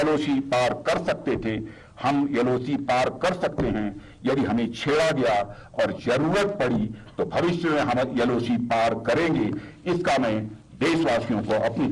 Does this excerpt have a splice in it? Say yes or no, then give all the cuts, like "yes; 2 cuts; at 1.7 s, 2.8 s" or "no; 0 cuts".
no; 0 cuts